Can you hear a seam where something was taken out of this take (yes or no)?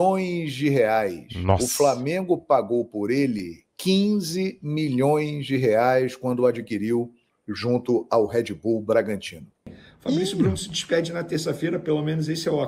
yes